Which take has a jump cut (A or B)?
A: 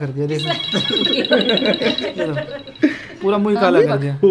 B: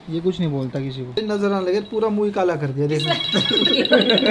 B